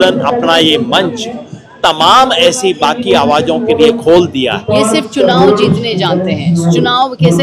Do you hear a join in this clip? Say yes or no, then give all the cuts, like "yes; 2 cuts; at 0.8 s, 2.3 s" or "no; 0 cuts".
yes; 1 cut; at 4.6 s